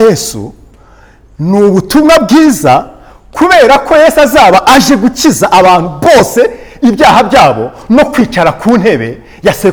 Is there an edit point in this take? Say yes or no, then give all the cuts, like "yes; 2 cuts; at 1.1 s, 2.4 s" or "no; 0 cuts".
no; 0 cuts